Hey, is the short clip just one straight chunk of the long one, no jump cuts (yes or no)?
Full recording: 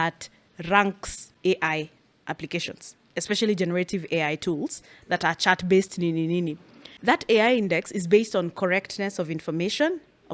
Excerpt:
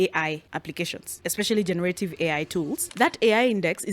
no